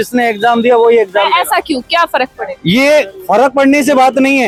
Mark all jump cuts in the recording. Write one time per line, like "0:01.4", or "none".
none